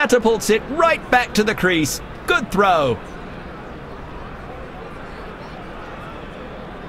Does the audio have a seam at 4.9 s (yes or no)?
no